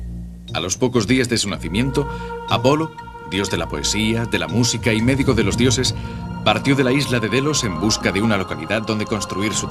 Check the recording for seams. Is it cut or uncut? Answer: uncut